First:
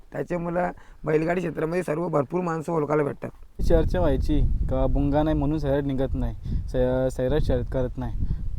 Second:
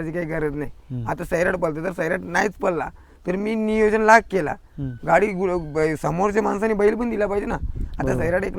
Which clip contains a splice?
first; 1 cut; at 3.5 s

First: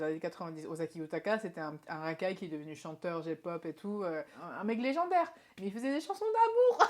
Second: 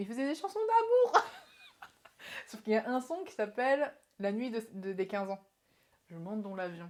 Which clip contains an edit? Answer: first; 1 cut; at 4.4 s

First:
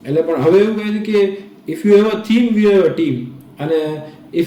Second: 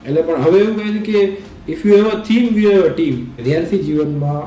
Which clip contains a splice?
second; 1 cut; at 3.3 s

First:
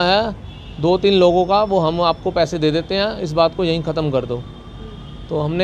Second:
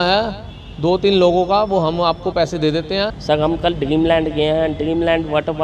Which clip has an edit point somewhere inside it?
second; 1 cut; at 3.2 s

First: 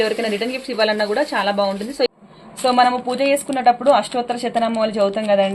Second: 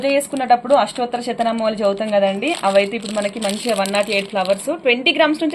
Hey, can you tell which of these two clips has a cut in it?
first; 1 cut; at 2.1 s

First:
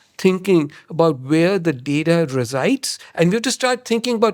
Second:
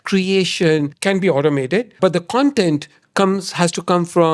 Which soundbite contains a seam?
second; 2 cuts; at 0.9 s, 1.9 s

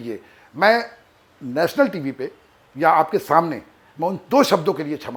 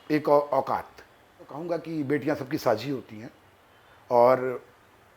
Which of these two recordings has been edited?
second; 1 cut; at 1.6 s

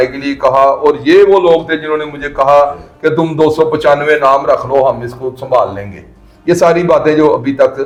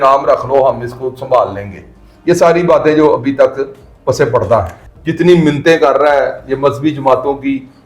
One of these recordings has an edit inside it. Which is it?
second; 1 cut; at 4.8 s

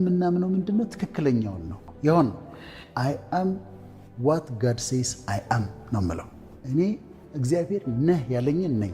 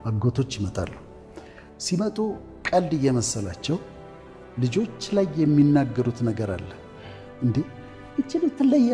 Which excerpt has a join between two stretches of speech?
first; 1 cut; at 1.9 s

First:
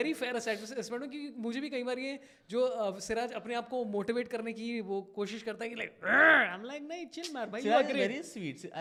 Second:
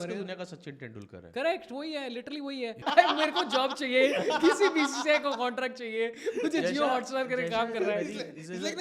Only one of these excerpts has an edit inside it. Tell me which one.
second; 1 cut; at 2.8 s

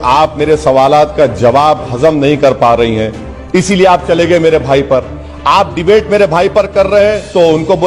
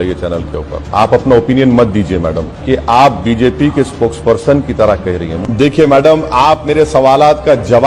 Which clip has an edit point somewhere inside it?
second; 3 cuts; at 0.8 s, 2.5 s, 5.3 s

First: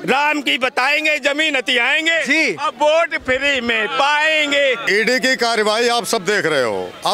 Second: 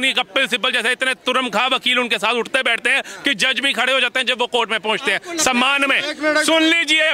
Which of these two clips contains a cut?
first; 1 cut; at 4.8 s

